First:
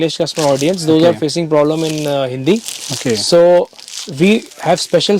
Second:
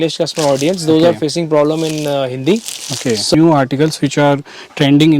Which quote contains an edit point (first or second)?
second